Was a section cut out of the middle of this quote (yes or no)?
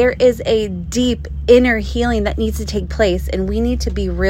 no